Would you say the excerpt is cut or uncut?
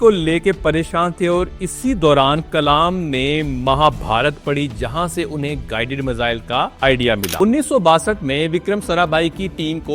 cut